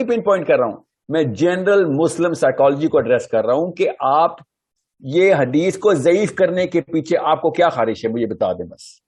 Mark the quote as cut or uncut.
uncut